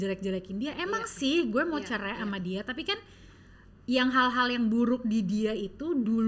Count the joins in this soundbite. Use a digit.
0